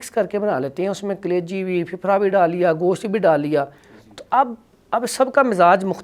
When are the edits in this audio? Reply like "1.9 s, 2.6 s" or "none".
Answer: none